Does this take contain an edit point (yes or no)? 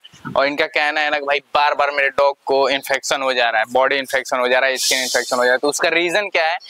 no